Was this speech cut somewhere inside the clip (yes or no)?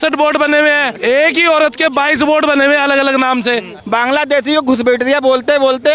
yes